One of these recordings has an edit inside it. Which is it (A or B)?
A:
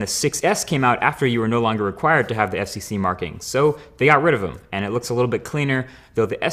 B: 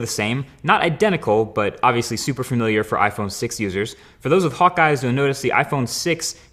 A